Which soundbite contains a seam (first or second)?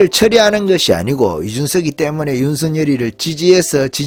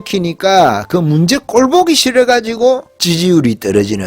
second